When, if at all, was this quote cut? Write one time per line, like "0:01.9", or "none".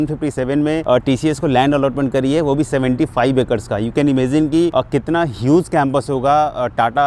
0:00.8
0:04.7